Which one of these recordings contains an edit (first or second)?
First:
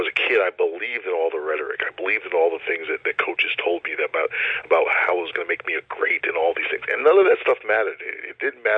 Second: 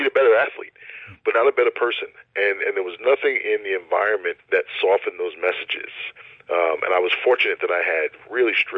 second